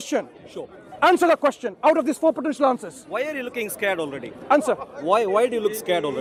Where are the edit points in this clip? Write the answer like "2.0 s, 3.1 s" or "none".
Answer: none